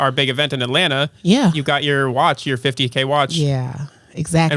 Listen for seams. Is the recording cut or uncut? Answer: uncut